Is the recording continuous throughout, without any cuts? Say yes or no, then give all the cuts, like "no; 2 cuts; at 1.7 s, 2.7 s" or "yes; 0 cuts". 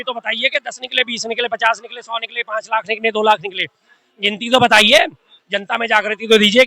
yes; 0 cuts